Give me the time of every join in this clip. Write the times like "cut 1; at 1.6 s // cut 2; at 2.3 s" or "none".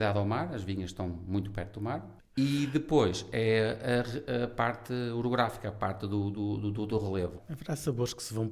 cut 1; at 2.1 s // cut 2; at 7.4 s

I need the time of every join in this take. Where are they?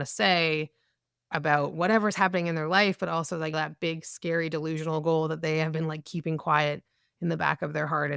cut 1; at 3.5 s

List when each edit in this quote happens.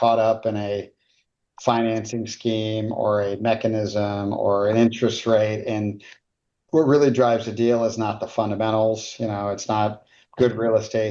none

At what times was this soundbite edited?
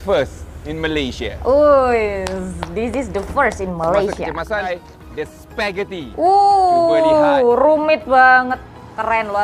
cut 1; at 4.6 s

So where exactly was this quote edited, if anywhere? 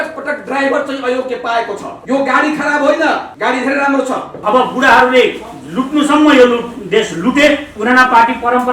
cut 1; at 1.9 s // cut 2; at 3.3 s // cut 3; at 4.3 s

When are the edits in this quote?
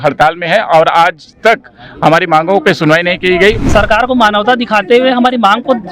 cut 1; at 3.6 s

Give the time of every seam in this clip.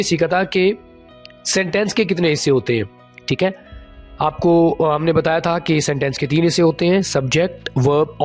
none

